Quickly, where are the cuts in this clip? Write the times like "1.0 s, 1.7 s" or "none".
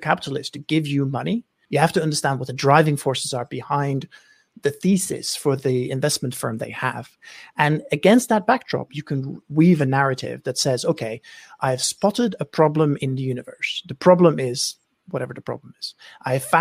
1.5 s